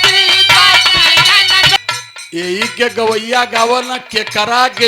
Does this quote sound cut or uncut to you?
cut